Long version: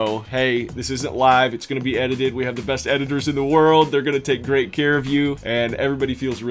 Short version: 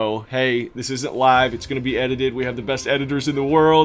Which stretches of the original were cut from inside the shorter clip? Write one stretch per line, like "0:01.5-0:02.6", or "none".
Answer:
none